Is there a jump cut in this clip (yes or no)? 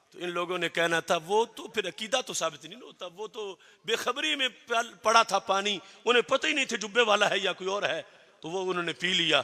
no